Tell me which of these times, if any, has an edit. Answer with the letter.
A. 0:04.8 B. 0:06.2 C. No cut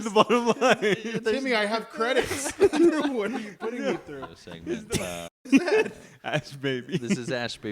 A